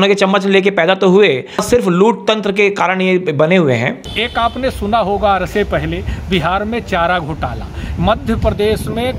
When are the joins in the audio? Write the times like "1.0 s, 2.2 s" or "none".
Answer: 1.6 s, 4.1 s